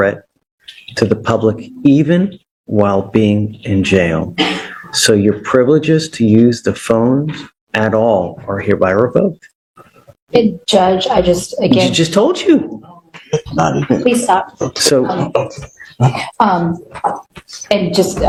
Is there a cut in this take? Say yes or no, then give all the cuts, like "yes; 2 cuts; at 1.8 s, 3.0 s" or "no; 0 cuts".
no; 0 cuts